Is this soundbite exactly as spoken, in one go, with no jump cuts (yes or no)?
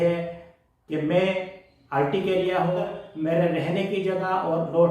no